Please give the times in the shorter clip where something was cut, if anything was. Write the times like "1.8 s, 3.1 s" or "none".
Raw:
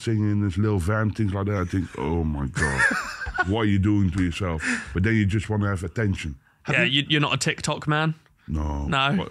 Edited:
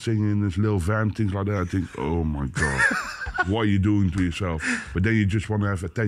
none